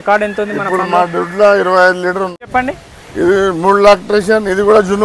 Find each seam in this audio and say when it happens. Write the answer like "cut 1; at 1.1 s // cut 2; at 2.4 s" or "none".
cut 1; at 2.4 s